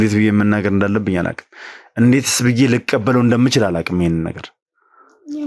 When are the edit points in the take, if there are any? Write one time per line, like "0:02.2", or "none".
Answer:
none